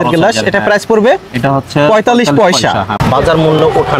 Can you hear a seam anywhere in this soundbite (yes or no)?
yes